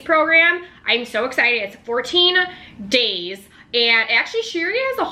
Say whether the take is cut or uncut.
uncut